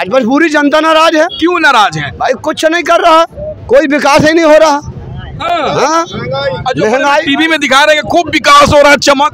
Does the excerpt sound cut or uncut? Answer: uncut